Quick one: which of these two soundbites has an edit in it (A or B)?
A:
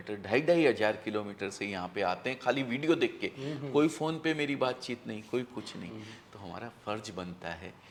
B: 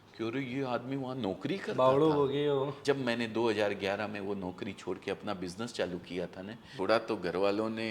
B